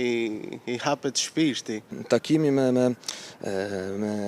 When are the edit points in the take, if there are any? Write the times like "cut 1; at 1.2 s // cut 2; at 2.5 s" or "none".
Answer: cut 1; at 2.2 s